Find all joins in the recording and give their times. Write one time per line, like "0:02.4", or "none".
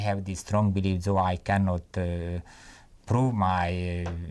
none